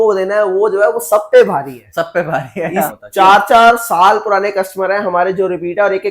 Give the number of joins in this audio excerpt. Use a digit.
1